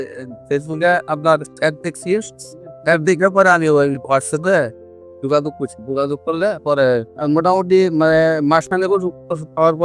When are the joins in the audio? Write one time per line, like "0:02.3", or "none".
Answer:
0:07.1